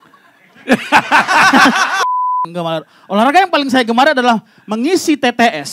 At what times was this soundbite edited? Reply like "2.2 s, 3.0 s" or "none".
2.1 s